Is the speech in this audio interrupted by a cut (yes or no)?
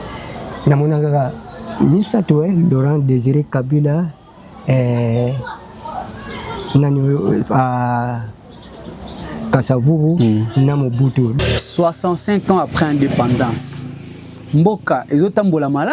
yes